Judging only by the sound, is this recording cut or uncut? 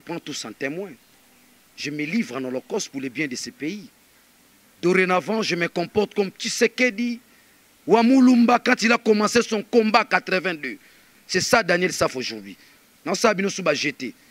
uncut